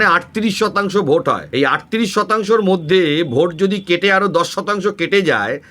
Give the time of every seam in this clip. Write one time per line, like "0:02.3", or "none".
0:01.4